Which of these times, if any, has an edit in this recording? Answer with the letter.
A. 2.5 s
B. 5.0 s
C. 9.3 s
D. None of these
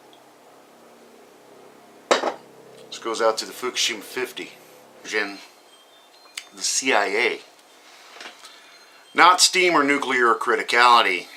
D